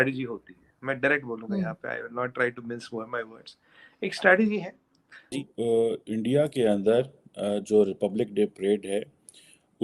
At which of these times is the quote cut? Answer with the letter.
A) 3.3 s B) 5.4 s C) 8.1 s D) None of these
B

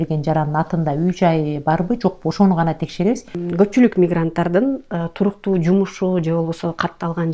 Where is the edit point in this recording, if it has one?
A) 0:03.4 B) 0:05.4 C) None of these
A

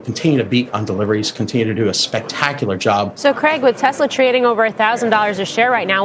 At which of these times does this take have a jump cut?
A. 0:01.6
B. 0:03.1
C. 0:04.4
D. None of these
B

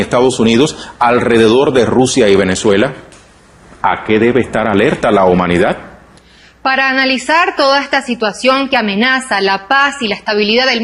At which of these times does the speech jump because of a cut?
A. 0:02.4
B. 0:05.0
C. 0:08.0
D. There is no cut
D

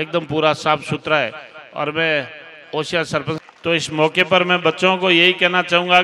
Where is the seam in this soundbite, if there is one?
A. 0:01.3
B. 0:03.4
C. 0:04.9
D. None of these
B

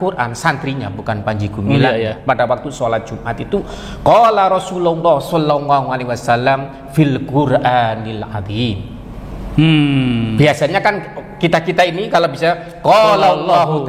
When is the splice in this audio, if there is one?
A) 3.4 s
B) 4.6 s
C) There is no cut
C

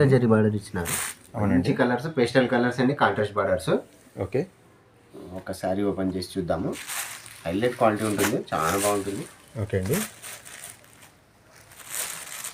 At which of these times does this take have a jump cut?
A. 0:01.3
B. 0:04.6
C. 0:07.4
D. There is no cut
D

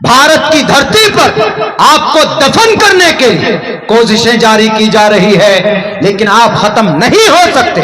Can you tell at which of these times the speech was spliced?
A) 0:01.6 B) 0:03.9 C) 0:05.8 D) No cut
D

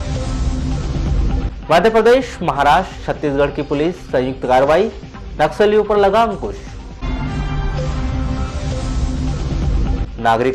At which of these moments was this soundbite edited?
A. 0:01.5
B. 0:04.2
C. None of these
A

